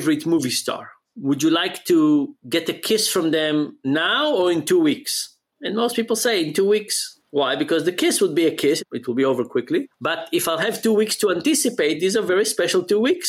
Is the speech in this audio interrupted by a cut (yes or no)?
no